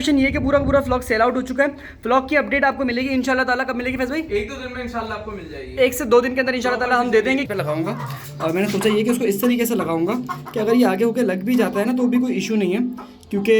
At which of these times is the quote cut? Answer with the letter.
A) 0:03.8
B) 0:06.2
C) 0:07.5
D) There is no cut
C